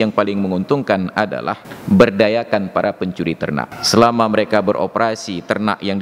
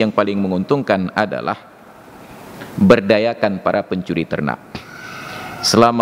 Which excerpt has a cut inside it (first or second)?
first